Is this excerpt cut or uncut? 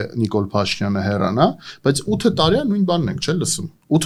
uncut